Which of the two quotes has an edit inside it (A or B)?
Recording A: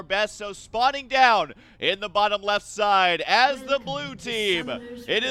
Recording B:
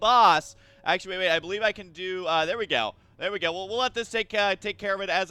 B